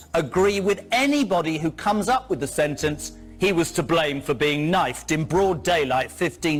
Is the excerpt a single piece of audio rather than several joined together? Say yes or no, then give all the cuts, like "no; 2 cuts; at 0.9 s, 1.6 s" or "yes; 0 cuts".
yes; 0 cuts